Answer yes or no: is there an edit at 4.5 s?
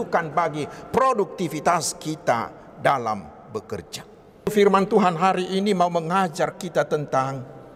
yes